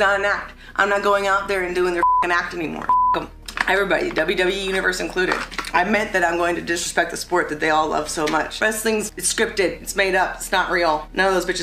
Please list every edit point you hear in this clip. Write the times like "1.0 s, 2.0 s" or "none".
2.9 s, 8.5 s